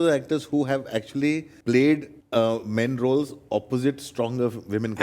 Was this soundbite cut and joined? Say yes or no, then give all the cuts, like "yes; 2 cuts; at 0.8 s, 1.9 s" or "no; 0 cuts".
yes; 2 cuts; at 1.5 s, 2.2 s